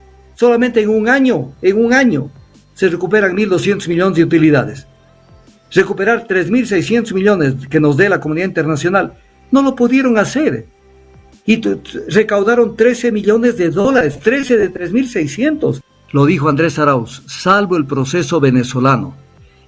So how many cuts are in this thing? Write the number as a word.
one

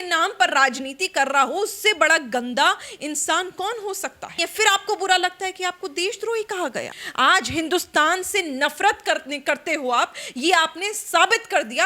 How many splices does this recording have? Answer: two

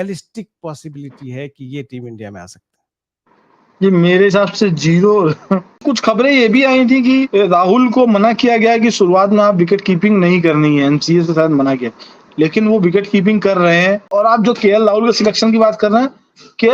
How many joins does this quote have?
three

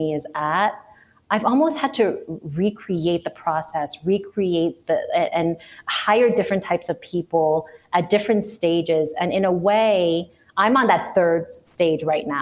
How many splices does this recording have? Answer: zero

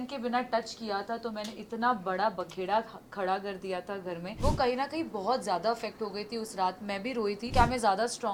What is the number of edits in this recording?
two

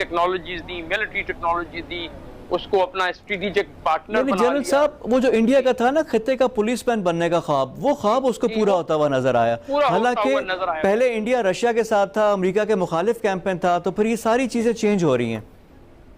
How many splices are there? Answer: zero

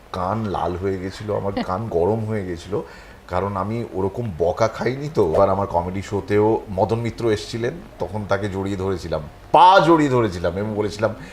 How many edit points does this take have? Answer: one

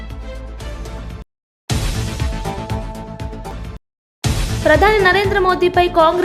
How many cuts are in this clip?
one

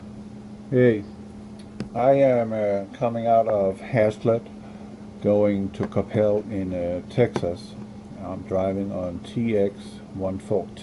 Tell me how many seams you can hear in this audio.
zero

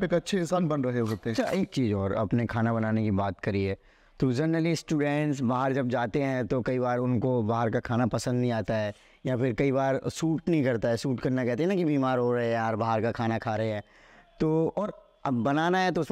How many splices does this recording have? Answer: one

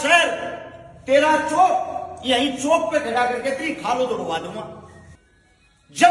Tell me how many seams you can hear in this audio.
one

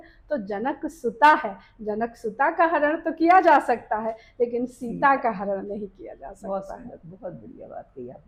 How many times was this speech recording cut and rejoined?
zero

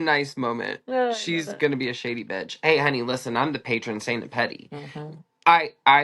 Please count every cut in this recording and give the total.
zero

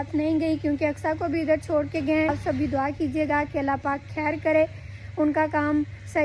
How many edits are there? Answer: one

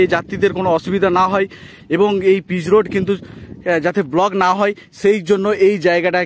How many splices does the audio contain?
zero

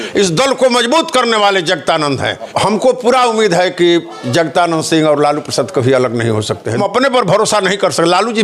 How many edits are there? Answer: two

